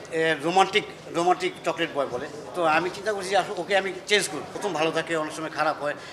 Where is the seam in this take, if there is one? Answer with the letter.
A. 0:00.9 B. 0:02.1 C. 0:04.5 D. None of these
C